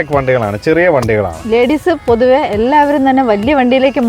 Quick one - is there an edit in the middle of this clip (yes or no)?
yes